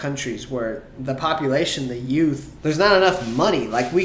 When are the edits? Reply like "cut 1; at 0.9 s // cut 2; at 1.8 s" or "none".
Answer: cut 1; at 2.5 s

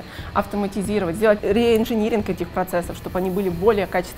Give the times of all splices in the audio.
cut 1; at 1.4 s

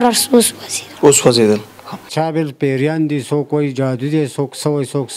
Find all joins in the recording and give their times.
cut 1; at 2.1 s

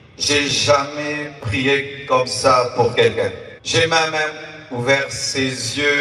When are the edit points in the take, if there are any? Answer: cut 1; at 3.5 s

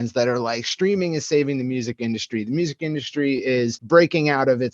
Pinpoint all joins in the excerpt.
cut 1; at 3.8 s

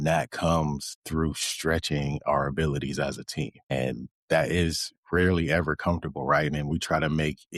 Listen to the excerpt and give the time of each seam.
none

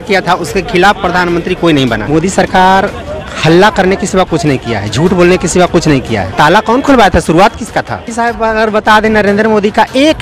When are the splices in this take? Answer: cut 1; at 2.0 s // cut 2; at 6.3 s // cut 3; at 8.1 s

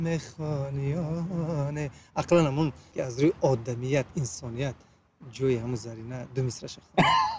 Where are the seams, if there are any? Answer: cut 1; at 2.9 s

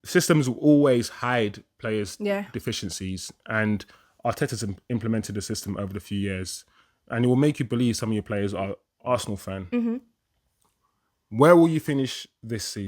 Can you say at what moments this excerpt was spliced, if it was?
cut 1; at 8.9 s

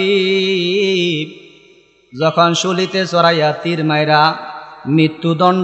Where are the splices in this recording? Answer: none

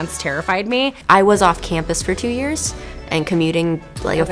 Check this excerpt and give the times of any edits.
cut 1; at 1.0 s

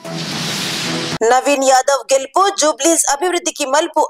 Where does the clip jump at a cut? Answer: cut 1; at 1.1 s

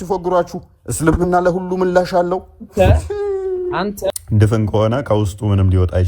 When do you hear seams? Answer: cut 1; at 4.1 s

